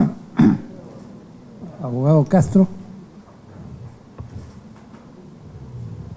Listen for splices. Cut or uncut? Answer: uncut